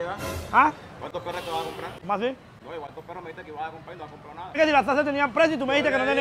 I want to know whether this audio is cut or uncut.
cut